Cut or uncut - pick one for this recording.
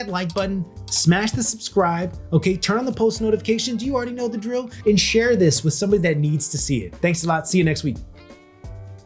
cut